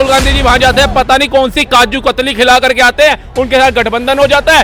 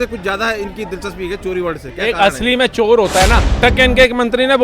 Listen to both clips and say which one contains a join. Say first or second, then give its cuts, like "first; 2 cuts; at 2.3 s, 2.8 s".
second; 1 cut; at 3.6 s